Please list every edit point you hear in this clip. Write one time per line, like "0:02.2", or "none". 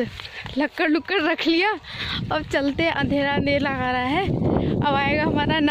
none